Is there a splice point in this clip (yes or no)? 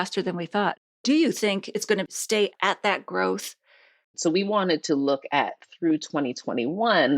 yes